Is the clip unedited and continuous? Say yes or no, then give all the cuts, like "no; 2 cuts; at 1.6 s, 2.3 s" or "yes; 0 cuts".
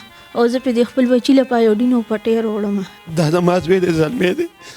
no; 1 cut; at 3.0 s